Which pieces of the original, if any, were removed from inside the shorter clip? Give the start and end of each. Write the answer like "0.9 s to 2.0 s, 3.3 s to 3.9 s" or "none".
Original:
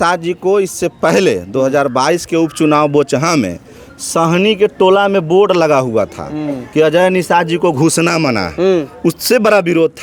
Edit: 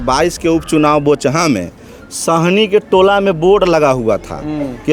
none